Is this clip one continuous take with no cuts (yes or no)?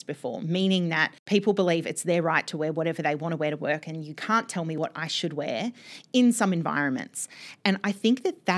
no